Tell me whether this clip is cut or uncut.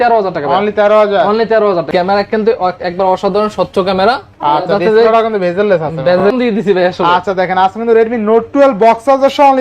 cut